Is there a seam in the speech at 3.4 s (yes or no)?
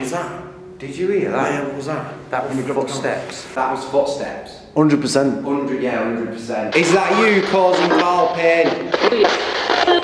yes